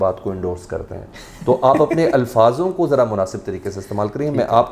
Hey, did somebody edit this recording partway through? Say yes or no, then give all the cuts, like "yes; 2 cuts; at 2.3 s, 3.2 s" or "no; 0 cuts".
no; 0 cuts